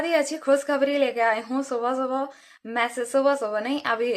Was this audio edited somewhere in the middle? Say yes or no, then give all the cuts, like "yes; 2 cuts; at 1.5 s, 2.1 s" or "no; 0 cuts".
no; 0 cuts